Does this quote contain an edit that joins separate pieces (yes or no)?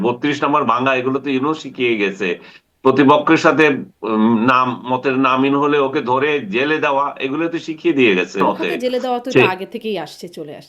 yes